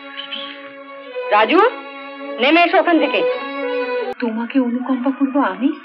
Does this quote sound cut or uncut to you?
cut